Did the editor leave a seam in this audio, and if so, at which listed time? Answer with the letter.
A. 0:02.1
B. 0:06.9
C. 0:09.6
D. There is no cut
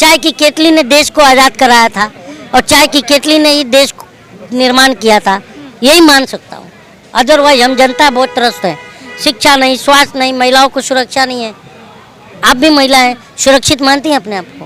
D